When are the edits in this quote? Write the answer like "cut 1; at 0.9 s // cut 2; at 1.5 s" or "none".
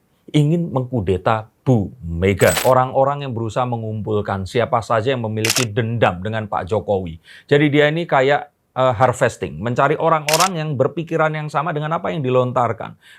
cut 1; at 2.6 s